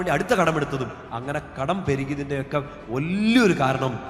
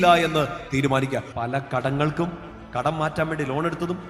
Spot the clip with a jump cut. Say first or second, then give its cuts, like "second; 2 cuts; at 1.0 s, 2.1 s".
second; 1 cut; at 1.3 s